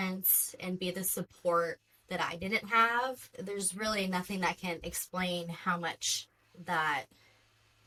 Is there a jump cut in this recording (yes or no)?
no